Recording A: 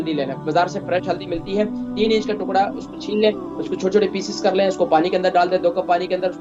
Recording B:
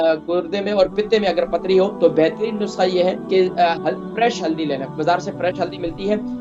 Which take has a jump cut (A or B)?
B